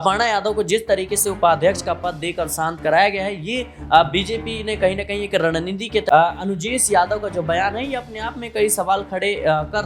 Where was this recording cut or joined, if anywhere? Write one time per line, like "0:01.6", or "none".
0:06.0